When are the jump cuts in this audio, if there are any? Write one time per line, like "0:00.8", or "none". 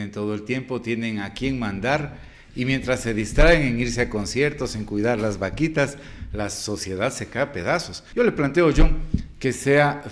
0:08.0

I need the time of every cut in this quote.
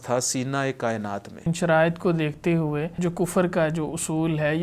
0:01.5
0:02.9

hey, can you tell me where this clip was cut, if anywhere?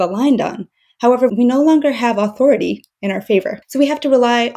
0:01.3

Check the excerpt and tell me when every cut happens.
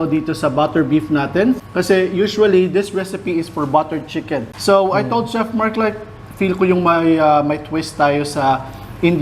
0:01.6
0:04.5

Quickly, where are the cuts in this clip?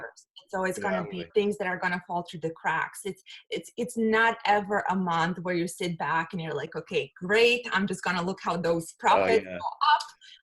0:01.3

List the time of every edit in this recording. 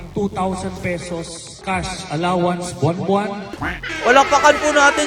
0:03.4

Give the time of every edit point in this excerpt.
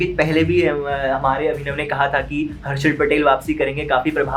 none

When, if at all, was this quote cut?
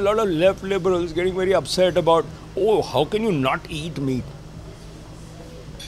none

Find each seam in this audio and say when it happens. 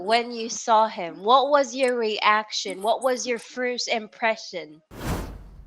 0:04.8

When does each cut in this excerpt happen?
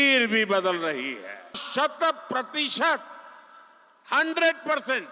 0:01.6

